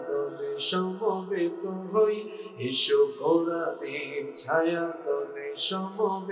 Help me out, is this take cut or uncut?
uncut